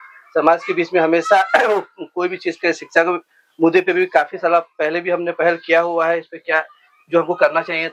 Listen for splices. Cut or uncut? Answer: uncut